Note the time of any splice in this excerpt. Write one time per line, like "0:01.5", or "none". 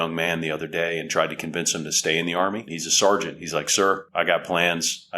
0:02.8
0:04.1